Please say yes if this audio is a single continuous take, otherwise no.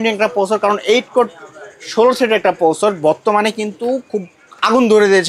yes